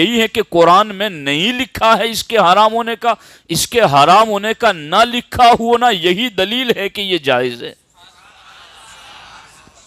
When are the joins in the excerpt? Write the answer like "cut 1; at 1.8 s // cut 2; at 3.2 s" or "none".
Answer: none